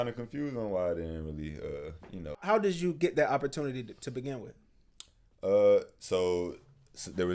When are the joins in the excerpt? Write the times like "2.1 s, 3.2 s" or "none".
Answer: 2.4 s